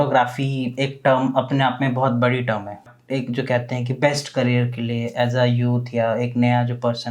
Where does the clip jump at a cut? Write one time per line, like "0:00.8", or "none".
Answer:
0:02.9